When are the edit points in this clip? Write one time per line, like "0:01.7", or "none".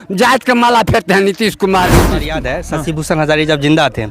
0:02.4